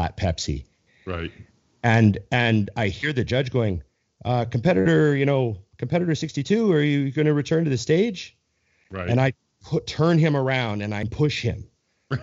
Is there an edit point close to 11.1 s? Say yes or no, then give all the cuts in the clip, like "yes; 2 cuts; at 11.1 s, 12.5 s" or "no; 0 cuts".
yes; 1 cut; at 11.1 s